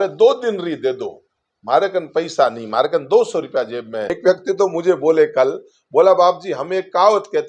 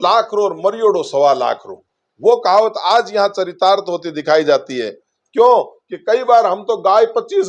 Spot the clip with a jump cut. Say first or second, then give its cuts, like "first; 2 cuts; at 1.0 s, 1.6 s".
first; 1 cut; at 4.1 s